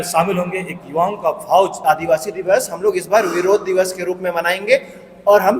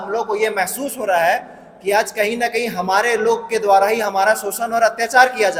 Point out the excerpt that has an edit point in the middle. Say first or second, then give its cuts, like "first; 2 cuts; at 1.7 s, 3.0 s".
first; 1 cut; at 1.8 s